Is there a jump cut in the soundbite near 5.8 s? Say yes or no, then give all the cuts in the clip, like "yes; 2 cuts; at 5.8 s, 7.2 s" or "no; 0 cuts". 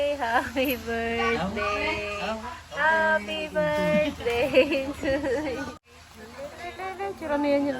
yes; 1 cut; at 5.8 s